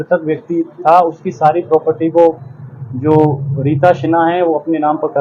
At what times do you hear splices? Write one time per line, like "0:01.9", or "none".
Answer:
none